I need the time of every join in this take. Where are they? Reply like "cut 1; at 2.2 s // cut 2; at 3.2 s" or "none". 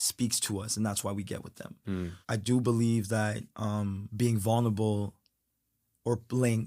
cut 1; at 2.2 s // cut 2; at 4.0 s